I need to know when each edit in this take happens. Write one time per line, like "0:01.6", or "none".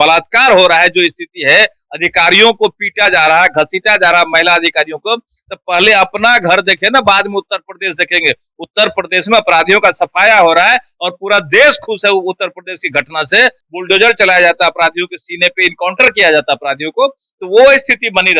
0:13.7